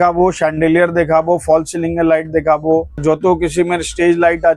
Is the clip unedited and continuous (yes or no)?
no